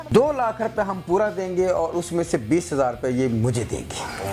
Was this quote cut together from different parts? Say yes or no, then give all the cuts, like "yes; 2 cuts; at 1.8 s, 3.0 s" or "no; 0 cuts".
no; 0 cuts